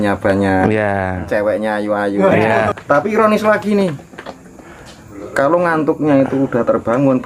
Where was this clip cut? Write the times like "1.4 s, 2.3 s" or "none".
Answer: 2.7 s